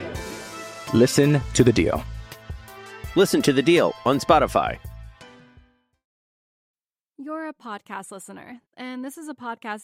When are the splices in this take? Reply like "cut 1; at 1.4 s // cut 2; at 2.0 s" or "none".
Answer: cut 1; at 6.6 s